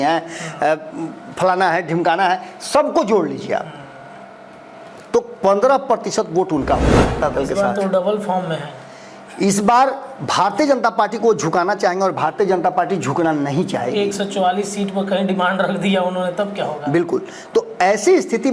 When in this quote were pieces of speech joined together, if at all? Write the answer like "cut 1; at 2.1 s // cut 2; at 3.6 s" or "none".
cut 1; at 7.2 s